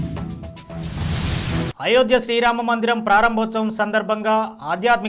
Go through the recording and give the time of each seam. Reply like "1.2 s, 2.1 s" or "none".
1.6 s